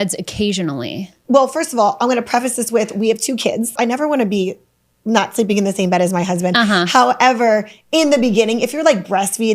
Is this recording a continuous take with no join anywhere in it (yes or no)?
no